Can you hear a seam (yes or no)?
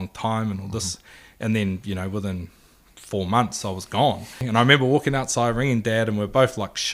yes